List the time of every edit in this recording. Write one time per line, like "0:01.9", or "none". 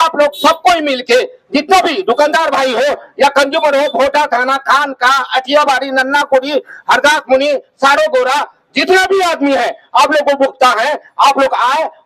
none